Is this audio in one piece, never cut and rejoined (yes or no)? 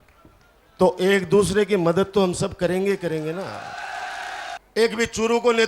no